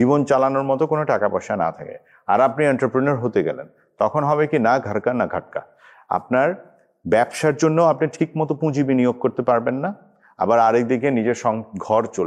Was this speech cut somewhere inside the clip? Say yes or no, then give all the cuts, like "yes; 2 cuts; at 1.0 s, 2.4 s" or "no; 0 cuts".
no; 0 cuts